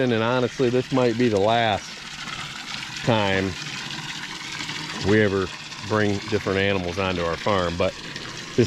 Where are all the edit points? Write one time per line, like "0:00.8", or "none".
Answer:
none